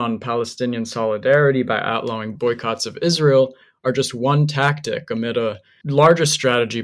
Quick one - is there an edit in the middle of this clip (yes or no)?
no